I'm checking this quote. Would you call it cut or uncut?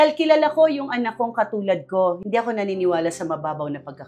cut